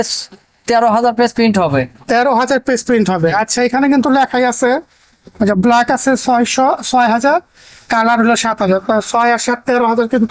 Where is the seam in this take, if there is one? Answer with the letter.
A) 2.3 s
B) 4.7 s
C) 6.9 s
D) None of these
D